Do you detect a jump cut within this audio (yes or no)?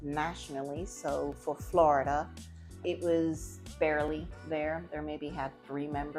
yes